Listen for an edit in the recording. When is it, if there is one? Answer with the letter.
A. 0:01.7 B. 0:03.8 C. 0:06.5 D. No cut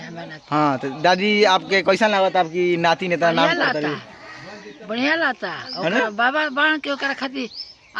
D